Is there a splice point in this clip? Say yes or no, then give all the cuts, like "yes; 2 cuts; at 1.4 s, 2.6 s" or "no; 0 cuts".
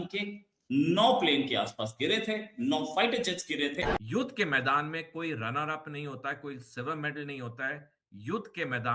yes; 1 cut; at 3.8 s